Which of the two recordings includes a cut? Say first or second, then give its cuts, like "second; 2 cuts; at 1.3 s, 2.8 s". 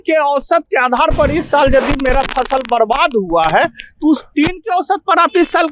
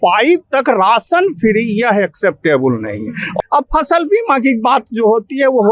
second; 1 cut; at 3.3 s